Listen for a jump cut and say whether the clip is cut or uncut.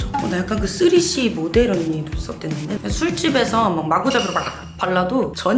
cut